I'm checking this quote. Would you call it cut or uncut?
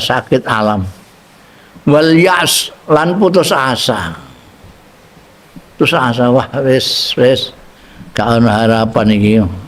uncut